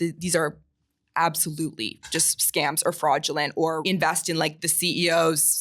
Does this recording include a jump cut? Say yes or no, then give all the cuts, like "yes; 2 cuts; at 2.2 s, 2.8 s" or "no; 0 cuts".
yes; 1 cut; at 3.8 s